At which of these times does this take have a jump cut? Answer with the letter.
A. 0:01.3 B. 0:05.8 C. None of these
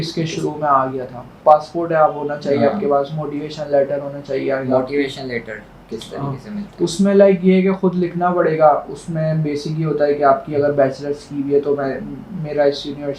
A